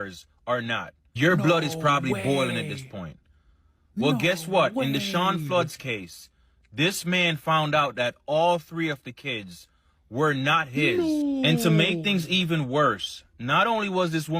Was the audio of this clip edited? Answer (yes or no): yes